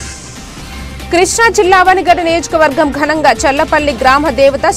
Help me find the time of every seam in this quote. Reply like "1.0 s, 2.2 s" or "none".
1.1 s